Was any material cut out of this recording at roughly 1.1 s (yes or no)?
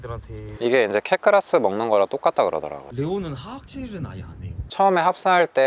no